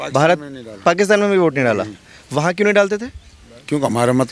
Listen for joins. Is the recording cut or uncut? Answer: uncut